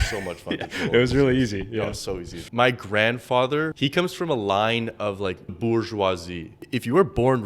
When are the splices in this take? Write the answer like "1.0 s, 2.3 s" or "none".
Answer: 2.3 s, 3.7 s, 5.6 s, 6.5 s